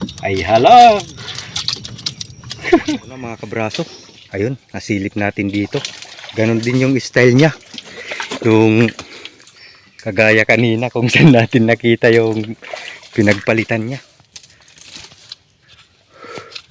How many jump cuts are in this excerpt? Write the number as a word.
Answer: two